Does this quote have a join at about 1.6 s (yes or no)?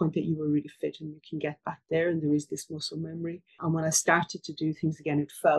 no